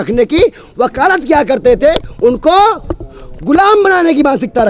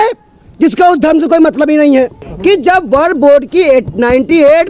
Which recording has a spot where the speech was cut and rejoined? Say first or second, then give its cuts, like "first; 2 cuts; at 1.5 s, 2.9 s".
second; 1 cut; at 2.2 s